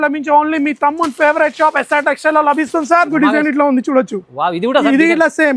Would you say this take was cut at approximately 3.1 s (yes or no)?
yes